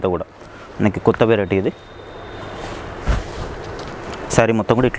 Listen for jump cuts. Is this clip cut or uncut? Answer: uncut